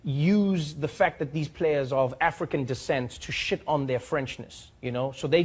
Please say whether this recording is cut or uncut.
uncut